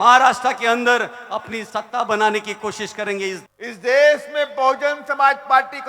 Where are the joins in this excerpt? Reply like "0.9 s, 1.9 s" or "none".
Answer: 3.4 s